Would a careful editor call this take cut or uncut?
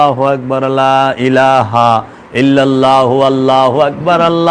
uncut